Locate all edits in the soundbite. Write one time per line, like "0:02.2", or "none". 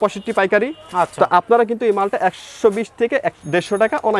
none